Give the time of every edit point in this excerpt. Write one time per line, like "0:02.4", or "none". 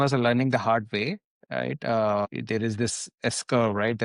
0:02.3